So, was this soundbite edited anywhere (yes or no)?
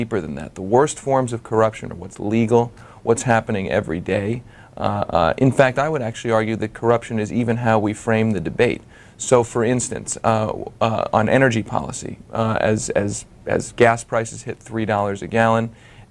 no